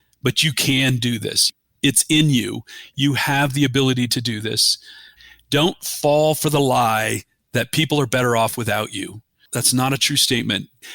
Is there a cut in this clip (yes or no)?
yes